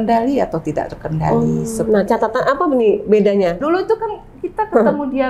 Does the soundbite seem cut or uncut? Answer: cut